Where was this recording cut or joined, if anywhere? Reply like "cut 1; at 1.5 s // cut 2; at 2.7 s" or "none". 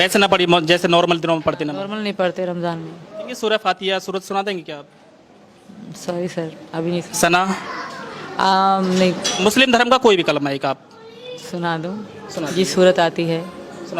cut 1; at 3.3 s // cut 2; at 9.3 s